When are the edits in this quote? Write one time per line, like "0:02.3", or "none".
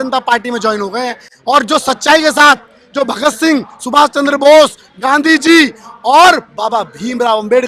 none